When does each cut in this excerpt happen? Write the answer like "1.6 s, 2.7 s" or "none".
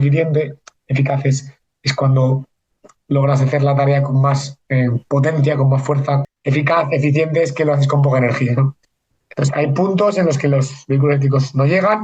6.2 s